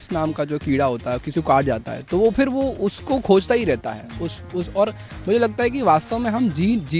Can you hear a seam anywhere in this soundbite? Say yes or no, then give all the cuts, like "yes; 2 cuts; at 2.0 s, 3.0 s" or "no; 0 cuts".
no; 0 cuts